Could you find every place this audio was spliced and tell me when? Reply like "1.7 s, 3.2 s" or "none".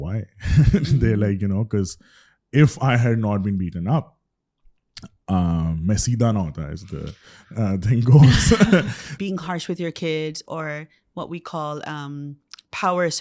9.0 s